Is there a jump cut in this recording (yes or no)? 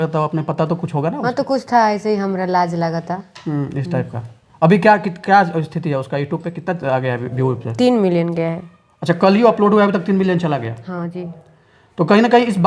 no